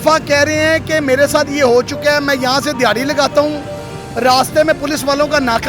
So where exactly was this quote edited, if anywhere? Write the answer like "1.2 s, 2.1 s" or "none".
none